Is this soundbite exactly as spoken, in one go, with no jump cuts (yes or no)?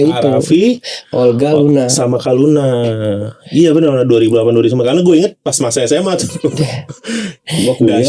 yes